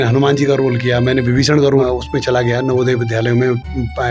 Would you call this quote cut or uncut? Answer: cut